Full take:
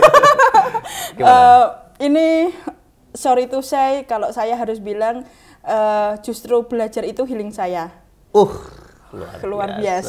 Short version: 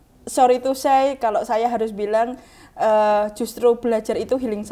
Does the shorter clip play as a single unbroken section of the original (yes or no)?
yes